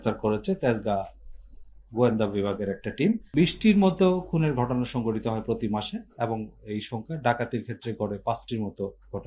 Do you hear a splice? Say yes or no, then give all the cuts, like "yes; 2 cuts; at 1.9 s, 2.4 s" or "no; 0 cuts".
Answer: yes; 1 cut; at 3.2 s